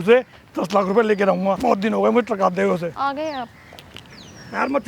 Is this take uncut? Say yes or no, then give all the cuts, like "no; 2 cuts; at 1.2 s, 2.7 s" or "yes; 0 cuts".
no; 2 cuts; at 1.6 s, 2.9 s